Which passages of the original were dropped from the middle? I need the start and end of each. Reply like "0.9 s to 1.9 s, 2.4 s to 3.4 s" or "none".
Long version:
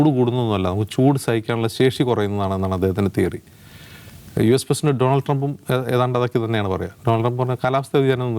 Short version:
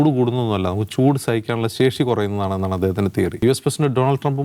3.4 s to 4.5 s